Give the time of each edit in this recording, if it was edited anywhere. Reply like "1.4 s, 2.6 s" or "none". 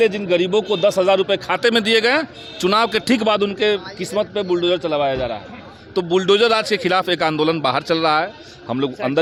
none